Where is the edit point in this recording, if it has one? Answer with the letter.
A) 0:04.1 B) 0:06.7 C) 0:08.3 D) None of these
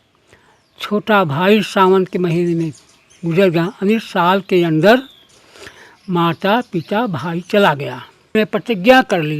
C